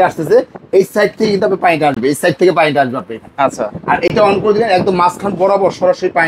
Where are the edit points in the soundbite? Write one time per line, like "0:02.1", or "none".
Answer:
none